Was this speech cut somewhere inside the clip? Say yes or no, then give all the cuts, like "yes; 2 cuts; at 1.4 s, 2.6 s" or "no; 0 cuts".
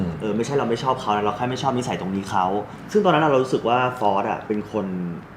yes; 1 cut; at 2.8 s